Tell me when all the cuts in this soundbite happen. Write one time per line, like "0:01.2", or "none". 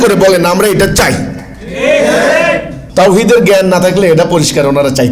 0:02.8